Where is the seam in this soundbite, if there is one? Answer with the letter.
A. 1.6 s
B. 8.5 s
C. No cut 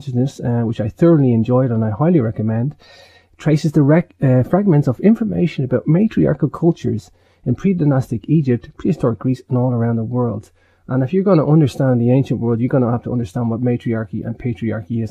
B